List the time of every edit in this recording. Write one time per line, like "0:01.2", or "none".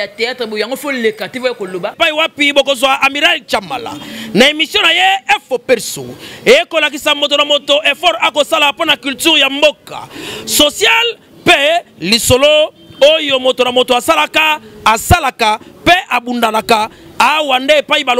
0:01.9

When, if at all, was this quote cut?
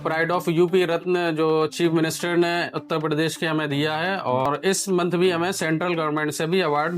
0:04.5

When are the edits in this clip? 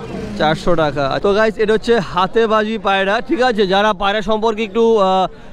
0:01.2

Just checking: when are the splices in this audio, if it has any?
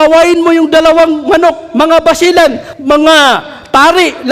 0:02.7

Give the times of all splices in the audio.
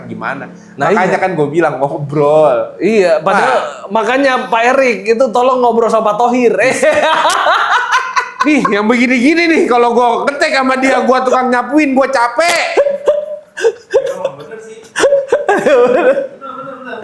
none

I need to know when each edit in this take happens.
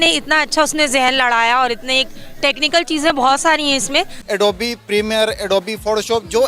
0:04.2

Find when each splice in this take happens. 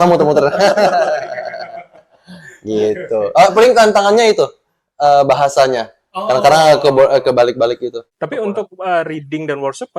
none

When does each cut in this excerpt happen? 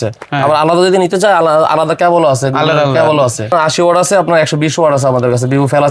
0:03.5

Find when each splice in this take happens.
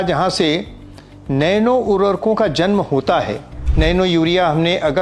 0:03.7

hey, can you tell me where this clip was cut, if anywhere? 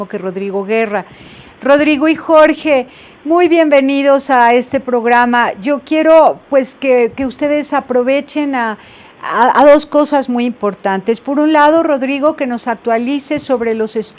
0:03.8

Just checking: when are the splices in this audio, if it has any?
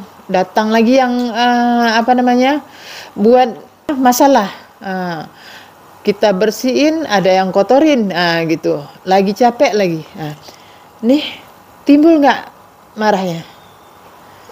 0:03.9

